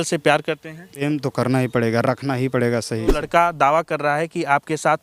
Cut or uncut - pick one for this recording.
cut